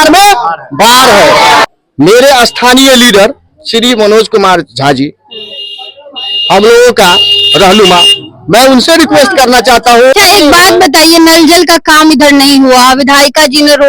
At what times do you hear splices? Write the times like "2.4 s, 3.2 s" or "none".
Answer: 1.6 s, 10.1 s